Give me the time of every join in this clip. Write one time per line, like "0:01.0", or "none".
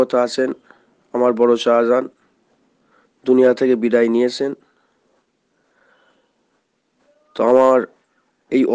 none